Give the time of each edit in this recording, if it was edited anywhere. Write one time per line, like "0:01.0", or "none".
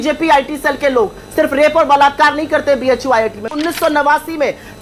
0:03.5